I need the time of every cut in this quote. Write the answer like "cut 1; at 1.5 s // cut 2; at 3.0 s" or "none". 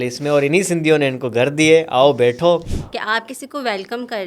cut 1; at 2.7 s

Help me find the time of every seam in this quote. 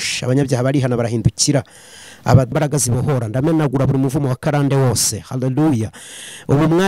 cut 1; at 2.5 s

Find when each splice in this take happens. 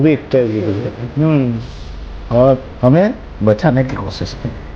cut 1; at 1.0 s

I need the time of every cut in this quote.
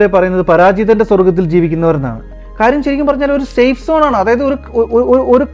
none

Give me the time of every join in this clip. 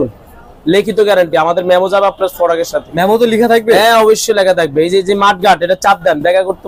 none

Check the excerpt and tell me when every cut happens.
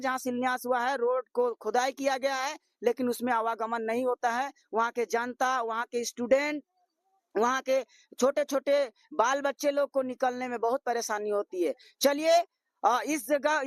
none

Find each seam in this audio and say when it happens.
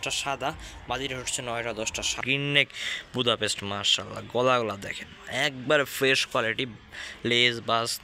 cut 1; at 2.2 s

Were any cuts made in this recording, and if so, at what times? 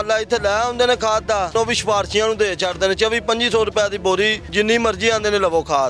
cut 1; at 1.5 s // cut 2; at 4.4 s

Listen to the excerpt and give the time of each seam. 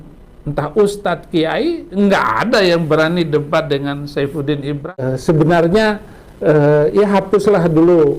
cut 1; at 5.0 s

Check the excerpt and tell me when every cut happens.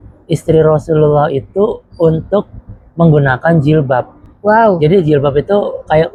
none

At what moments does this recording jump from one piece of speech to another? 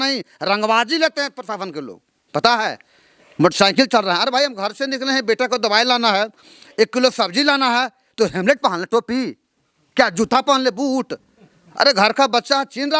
none

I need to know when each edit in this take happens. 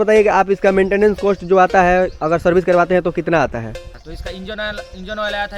cut 1; at 3.9 s

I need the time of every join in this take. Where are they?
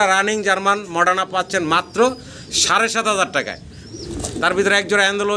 none

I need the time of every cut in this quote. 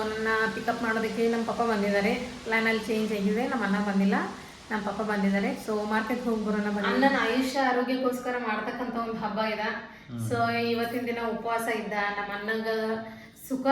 cut 1; at 6.9 s

